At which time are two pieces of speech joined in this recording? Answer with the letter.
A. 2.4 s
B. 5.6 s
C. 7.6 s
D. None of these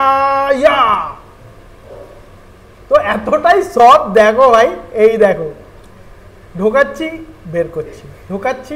D